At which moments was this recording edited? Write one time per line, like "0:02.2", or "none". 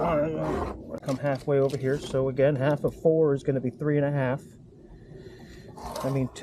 0:01.0